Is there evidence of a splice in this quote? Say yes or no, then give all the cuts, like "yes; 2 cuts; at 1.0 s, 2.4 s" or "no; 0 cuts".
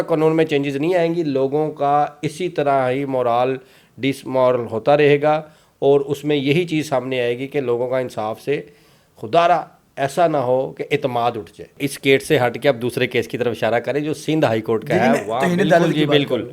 yes; 1 cut; at 11.8 s